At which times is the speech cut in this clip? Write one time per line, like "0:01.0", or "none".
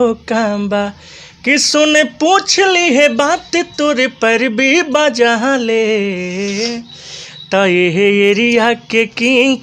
none